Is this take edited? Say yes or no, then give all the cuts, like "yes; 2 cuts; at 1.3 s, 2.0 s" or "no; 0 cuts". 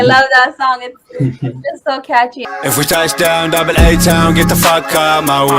yes; 1 cut; at 2.4 s